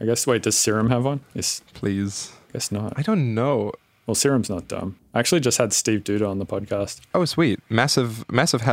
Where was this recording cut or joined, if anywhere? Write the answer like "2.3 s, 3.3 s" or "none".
7.0 s

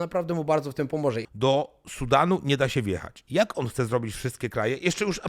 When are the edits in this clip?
1.2 s, 3.1 s

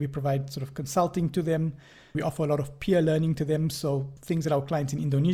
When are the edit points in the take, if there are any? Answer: 2.2 s, 4.1 s

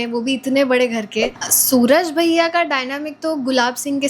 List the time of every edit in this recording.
1.4 s

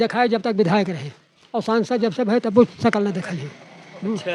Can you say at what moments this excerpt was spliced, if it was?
none

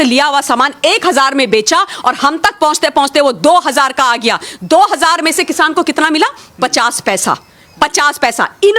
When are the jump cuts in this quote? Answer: none

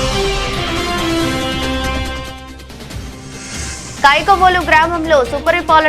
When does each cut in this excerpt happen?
none

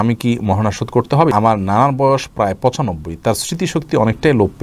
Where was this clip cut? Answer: 1.3 s

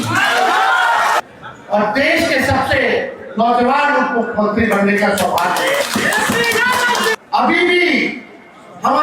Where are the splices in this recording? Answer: 1.2 s, 7.2 s

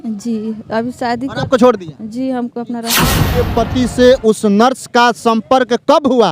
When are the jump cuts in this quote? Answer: 3.2 s

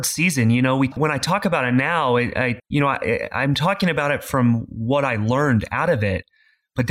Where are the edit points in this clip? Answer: 0.9 s, 2.6 s

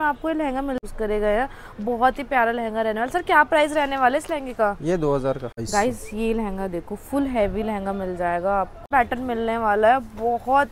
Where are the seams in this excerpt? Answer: 0.8 s, 5.5 s, 8.8 s

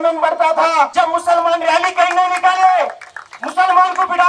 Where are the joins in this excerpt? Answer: 0.9 s

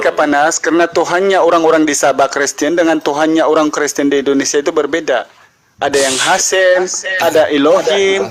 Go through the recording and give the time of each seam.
none

